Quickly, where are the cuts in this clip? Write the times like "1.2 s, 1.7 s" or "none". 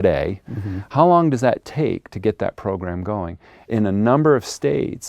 3.7 s